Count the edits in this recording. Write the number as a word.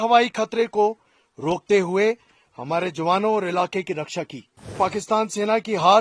one